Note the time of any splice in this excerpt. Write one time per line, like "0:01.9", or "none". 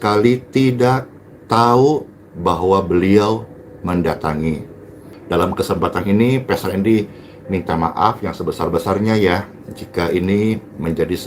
0:05.1